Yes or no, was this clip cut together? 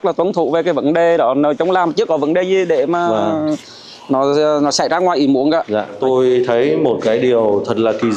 yes